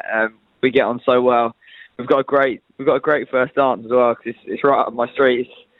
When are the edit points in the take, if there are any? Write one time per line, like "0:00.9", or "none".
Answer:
none